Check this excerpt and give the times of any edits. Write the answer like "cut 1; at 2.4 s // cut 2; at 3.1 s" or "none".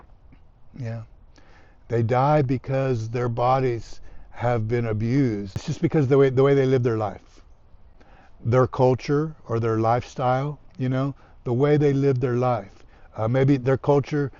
cut 1; at 5.7 s